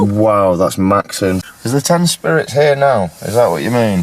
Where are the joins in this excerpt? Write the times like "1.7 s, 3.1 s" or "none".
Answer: 1.4 s